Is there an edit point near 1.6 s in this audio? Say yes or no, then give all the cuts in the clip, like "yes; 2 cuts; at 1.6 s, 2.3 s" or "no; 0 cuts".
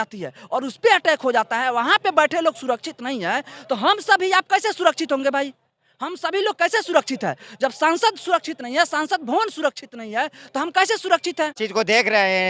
no; 0 cuts